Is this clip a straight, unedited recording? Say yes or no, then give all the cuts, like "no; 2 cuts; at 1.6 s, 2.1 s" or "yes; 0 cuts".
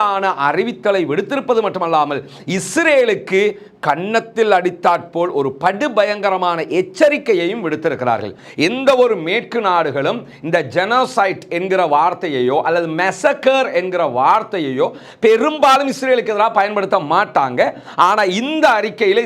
no; 1 cut; at 8.4 s